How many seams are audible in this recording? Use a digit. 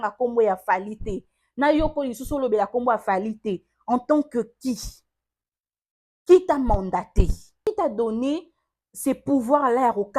1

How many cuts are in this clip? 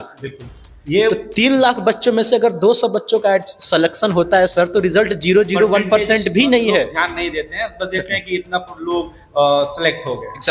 0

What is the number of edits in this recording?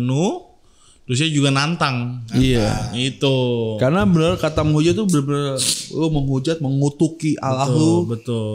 0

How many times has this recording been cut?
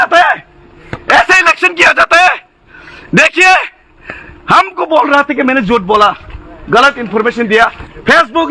0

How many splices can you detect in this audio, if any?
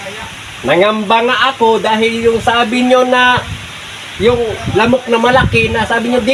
0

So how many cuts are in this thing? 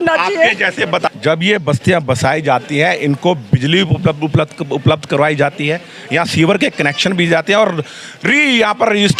1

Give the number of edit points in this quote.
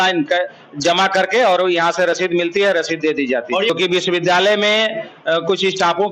1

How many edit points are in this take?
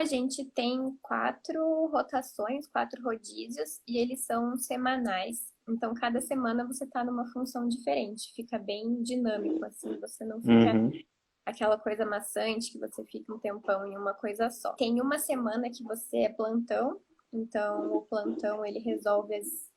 2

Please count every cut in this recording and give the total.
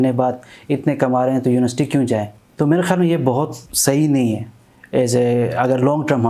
2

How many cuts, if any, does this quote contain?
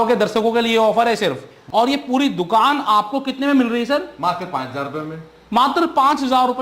1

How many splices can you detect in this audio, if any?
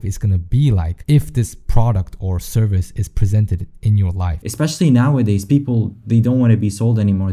2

